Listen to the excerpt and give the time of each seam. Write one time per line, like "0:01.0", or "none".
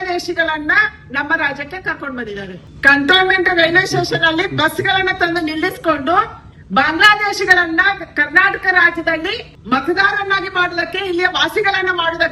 0:02.6